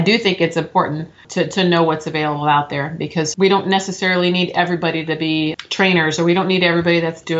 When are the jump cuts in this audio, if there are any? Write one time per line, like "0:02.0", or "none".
0:01.2
0:03.3
0:05.5